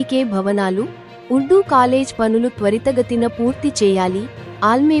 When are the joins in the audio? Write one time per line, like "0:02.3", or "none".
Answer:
none

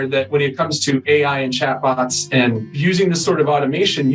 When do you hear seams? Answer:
0:02.7

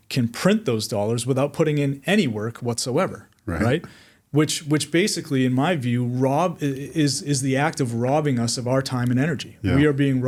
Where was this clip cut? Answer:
none

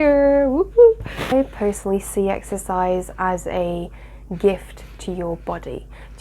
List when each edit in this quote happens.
0:01.3

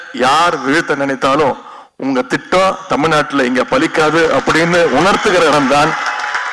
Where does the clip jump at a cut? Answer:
none

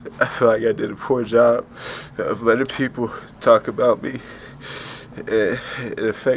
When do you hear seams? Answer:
none

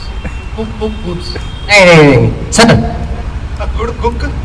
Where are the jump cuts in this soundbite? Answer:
none

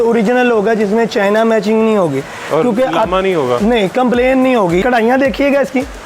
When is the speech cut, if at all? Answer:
0:04.8

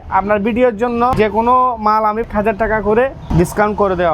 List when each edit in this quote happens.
0:01.1
0:02.2
0:03.2

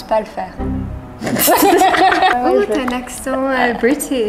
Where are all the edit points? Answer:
0:02.3

